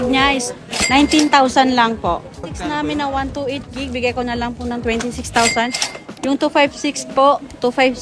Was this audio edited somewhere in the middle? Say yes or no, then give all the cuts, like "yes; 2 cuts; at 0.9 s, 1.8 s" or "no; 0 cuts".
yes; 1 cut; at 2.5 s